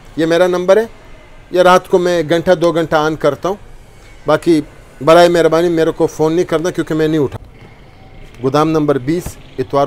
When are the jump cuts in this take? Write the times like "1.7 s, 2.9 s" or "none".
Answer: 7.4 s